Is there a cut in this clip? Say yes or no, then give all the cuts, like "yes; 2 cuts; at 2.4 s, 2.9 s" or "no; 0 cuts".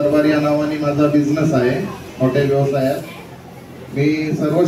no; 0 cuts